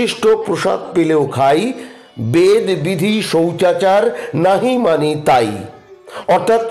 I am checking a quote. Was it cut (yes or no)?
no